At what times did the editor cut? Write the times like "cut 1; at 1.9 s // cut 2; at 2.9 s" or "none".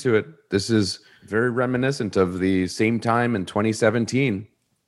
cut 1; at 1.0 s